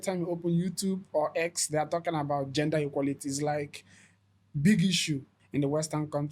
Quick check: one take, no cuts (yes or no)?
no